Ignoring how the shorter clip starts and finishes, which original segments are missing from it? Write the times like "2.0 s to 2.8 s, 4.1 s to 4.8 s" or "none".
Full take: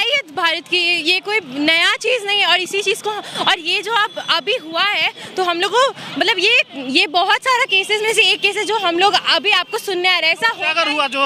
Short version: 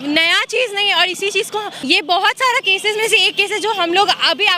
3.3 s to 6.8 s